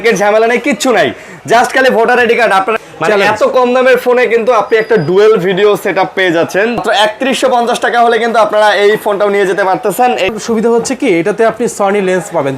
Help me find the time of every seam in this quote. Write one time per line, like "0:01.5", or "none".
0:02.8
0:06.8
0:10.3